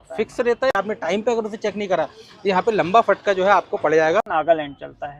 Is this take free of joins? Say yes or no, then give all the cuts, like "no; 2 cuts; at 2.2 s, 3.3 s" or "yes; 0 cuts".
no; 2 cuts; at 0.7 s, 4.3 s